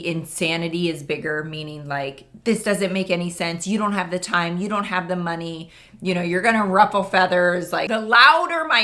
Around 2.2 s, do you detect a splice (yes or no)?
no